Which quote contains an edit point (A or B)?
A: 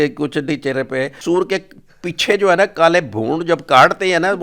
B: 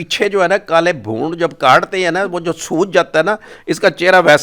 A